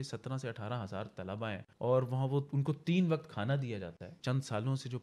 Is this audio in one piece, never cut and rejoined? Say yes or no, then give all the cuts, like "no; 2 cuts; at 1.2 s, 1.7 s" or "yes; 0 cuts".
no; 2 cuts; at 1.7 s, 4.2 s